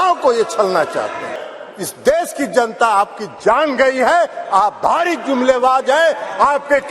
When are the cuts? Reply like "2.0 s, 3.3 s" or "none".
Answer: 1.4 s